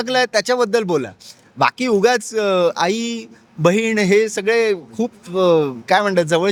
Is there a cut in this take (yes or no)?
no